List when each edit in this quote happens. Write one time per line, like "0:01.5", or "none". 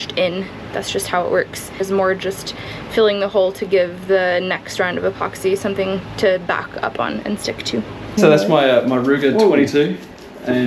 0:01.8
0:08.2

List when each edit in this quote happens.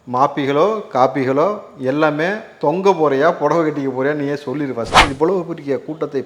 0:05.0

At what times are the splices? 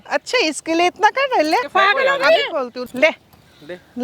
0:01.7
0:02.9

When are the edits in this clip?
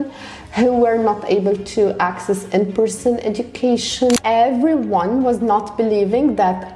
0:04.2

